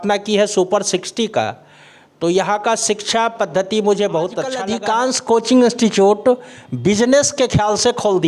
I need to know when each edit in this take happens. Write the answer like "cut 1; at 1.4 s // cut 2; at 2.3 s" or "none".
cut 1; at 4.6 s